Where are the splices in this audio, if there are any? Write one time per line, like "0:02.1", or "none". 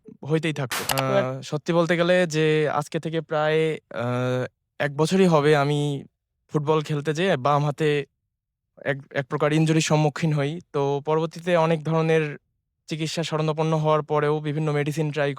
0:01.2